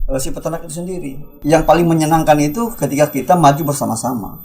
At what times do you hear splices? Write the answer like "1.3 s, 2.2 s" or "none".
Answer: 1.3 s